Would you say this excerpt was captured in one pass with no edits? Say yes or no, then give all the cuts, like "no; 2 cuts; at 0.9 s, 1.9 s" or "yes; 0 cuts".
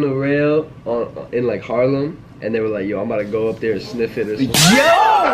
yes; 0 cuts